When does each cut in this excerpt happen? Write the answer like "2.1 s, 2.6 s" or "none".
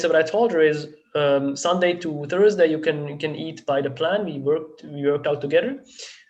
none